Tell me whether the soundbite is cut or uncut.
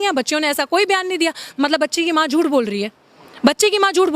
uncut